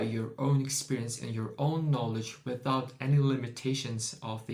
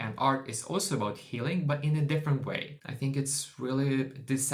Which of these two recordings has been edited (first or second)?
second